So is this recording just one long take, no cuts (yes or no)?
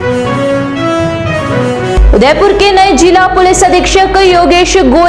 no